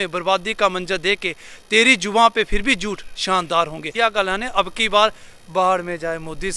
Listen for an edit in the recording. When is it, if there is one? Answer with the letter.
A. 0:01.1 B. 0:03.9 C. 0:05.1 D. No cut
B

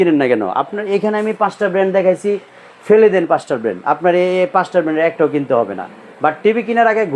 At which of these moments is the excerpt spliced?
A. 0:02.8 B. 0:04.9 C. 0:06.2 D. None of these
D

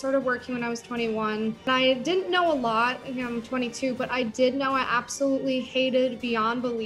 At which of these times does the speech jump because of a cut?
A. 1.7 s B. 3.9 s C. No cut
A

